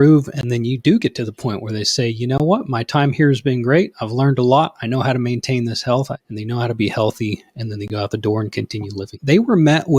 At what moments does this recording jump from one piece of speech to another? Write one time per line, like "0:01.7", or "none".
0:06.2
0:09.1